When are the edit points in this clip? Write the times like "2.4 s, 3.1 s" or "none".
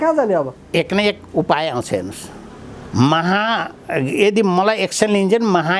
none

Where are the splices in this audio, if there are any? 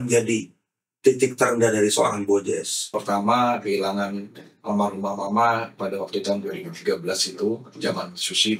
3.0 s

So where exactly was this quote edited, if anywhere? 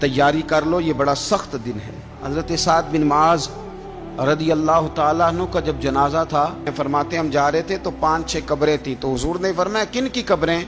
2.2 s, 6.7 s

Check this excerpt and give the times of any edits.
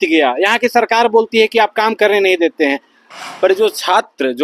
3.0 s

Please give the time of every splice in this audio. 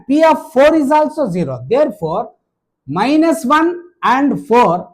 none

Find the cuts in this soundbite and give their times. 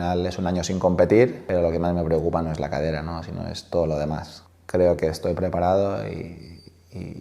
1.4 s, 4.5 s

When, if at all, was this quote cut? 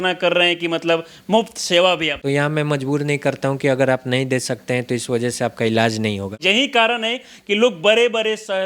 2.2 s, 6.4 s

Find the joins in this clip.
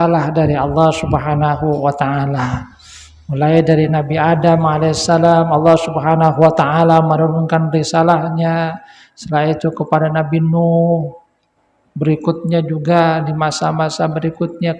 none

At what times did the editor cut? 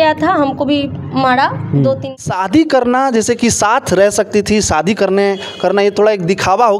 2.1 s

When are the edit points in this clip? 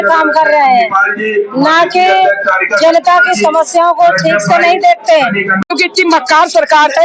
5.5 s

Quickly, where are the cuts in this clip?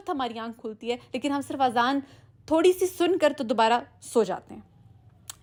none

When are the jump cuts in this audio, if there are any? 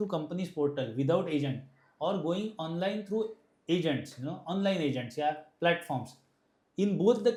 none

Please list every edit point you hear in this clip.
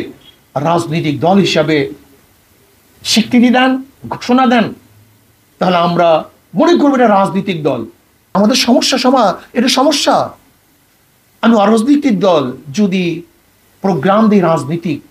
8.3 s

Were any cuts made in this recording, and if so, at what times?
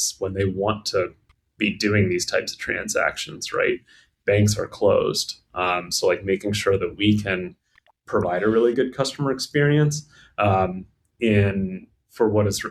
none

